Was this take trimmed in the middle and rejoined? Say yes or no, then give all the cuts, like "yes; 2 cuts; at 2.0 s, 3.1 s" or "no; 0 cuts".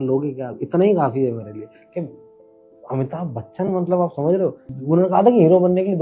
yes; 1 cut; at 4.7 s